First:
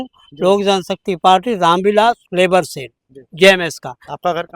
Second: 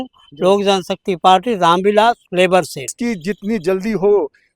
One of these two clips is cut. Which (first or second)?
second